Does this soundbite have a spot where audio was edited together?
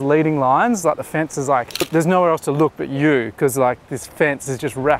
yes; 1 cut; at 1.9 s

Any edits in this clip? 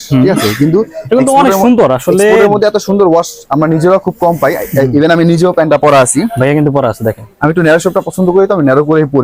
no; 0 cuts

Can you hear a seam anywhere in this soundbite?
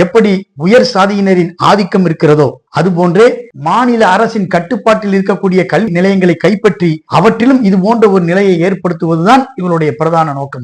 yes; 1 cut; at 3.5 s

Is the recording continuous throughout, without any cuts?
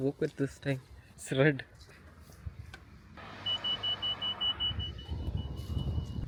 yes; 0 cuts

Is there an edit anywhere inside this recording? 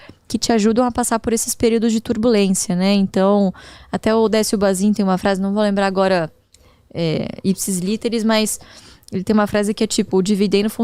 no; 0 cuts

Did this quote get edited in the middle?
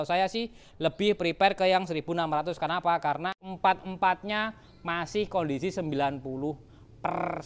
yes; 1 cut; at 3.4 s

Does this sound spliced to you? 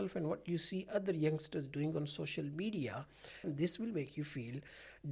yes; 1 cut; at 3.5 s

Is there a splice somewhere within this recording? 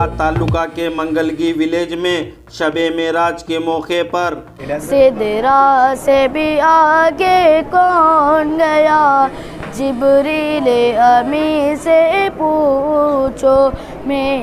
yes; 1 cut; at 4.6 s

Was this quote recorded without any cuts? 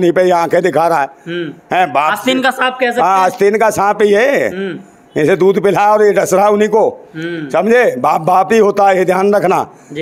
yes; 0 cuts

